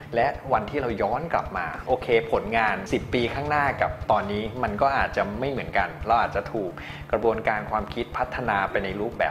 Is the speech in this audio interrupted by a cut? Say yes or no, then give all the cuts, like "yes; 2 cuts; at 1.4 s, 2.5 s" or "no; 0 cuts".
no; 0 cuts